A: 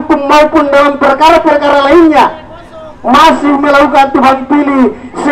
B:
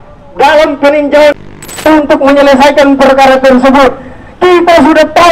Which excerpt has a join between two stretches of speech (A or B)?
B